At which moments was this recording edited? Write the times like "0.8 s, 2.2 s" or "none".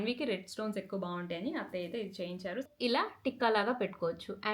2.6 s

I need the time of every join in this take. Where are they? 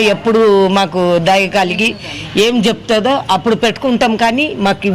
none

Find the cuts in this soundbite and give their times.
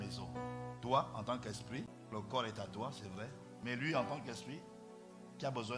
none

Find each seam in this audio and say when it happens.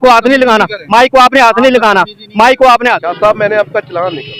3.1 s

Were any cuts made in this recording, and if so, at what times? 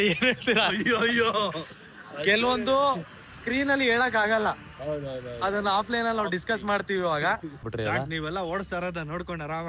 7.7 s

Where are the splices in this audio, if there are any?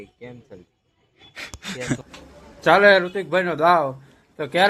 2.1 s

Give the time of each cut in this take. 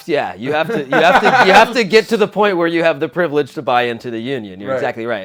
none

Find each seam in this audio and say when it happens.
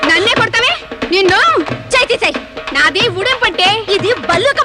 none

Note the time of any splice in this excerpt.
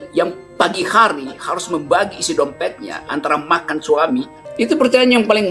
4.4 s

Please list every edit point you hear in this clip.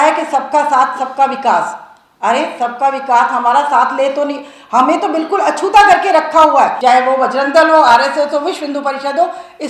6.8 s

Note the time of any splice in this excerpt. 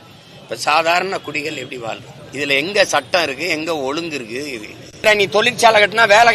2.2 s, 5.0 s

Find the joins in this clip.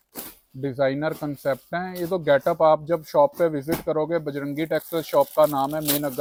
none

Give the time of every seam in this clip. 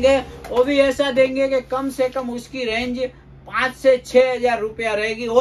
none

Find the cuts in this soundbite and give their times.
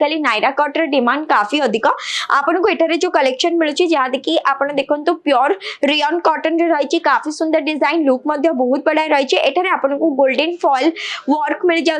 none

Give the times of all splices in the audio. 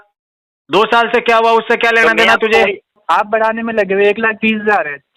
2.9 s

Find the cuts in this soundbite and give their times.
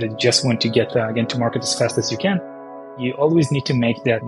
none

